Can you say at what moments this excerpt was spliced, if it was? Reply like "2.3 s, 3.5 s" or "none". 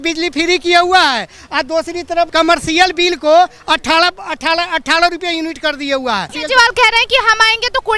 2.3 s, 6.4 s